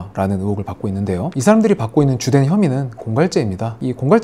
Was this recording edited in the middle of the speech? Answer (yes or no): no